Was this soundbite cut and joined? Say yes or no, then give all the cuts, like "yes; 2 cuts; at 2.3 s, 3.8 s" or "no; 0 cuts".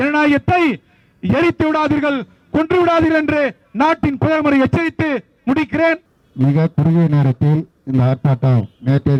no; 0 cuts